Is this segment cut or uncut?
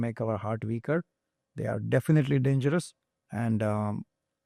uncut